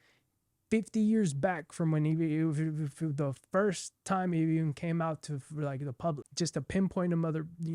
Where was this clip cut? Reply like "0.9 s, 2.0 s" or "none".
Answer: 6.3 s